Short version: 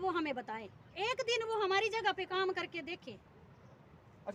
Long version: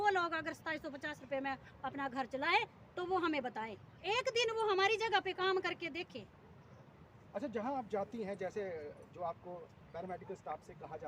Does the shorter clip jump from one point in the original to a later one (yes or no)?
no